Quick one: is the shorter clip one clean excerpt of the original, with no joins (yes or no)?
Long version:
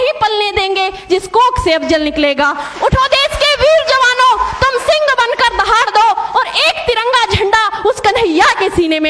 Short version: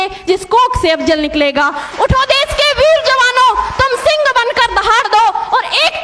yes